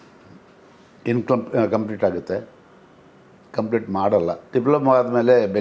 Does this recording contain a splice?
yes; 1 cut; at 4.4 s

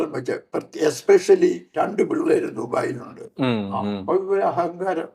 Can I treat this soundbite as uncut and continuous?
no; 1 cut; at 1.7 s

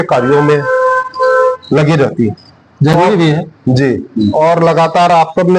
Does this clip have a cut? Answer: no; 0 cuts

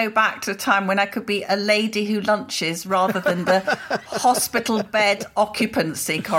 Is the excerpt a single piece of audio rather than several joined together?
yes; 0 cuts

